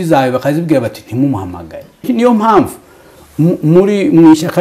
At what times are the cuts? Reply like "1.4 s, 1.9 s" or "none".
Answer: 2.0 s

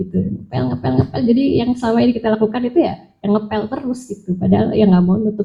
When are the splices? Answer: none

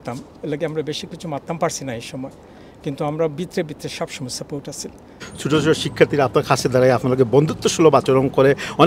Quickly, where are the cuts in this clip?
5.3 s

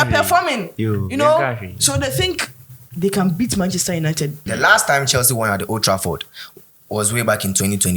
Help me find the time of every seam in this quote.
4.4 s

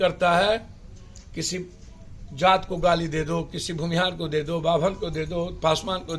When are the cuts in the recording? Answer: none

